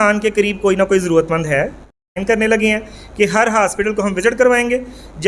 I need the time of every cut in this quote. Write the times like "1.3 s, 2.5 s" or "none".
2.0 s